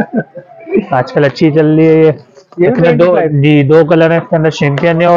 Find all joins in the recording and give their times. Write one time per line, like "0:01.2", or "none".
none